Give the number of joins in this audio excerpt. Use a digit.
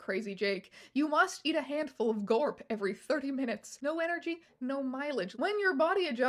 2